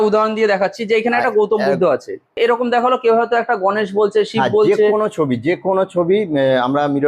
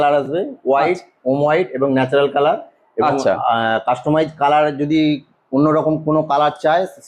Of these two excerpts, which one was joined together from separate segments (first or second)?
first